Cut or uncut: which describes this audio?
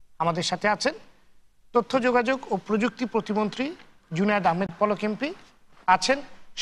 cut